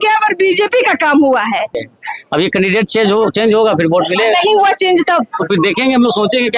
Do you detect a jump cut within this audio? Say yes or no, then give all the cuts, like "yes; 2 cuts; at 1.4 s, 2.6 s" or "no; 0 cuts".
yes; 1 cut; at 1.8 s